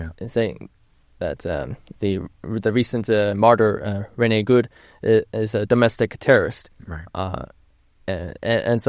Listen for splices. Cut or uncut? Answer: uncut